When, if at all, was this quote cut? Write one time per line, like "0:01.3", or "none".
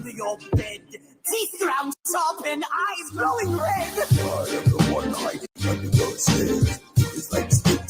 none